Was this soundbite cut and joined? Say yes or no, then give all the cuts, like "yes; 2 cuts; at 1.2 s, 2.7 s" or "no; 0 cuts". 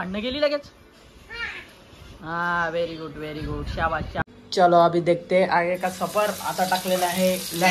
yes; 1 cut; at 4.2 s